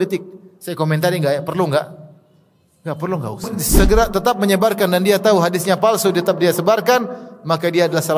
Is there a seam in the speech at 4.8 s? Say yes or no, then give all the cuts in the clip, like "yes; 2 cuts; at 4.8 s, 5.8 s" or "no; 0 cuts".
no; 1 cut; at 3.6 s